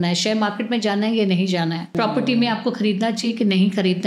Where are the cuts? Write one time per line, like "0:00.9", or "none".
0:01.9